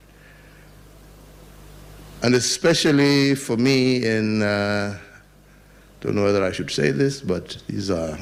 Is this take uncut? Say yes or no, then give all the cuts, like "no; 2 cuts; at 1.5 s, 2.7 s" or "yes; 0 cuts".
yes; 0 cuts